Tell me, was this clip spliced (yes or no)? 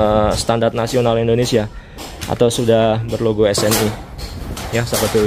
no